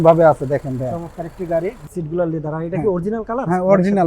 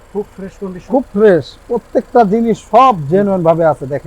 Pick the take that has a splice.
first; 1 cut; at 1.8 s

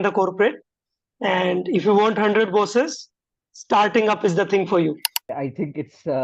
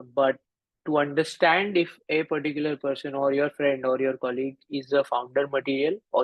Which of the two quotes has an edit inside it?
first; 1 cut; at 5.3 s

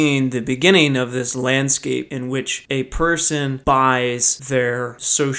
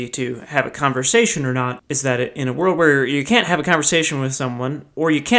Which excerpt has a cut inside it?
first; 2 cuts; at 2.1 s, 4.3 s

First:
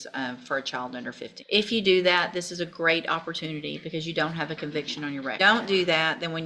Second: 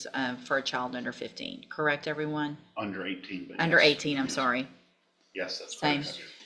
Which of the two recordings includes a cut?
first; 2 cuts; at 1.3 s, 5.4 s

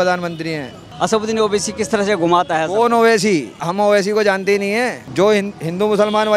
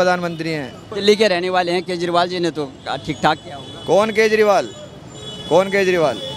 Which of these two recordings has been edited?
first; 2 cuts; at 0.9 s, 5.0 s

